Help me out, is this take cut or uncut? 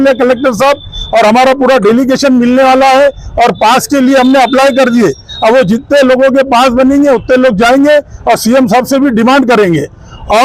uncut